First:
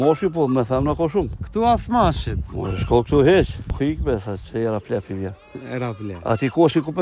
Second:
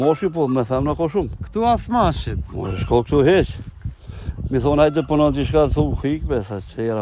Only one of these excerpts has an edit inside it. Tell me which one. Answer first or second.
first